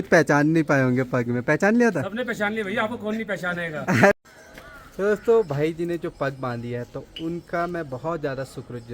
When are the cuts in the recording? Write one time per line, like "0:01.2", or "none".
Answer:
0:04.1